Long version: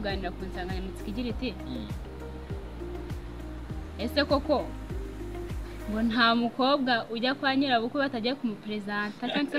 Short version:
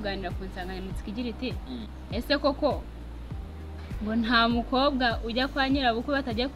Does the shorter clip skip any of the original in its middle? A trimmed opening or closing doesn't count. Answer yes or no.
yes